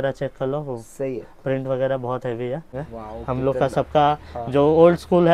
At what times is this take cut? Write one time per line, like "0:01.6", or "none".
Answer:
0:02.8